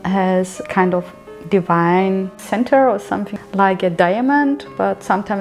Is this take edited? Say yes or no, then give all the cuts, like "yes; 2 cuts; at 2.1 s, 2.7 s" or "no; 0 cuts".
no; 0 cuts